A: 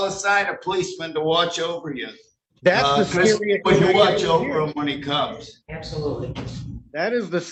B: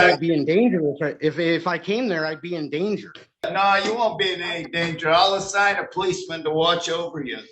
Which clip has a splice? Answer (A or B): B